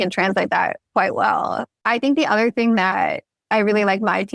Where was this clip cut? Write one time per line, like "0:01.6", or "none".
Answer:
0:01.7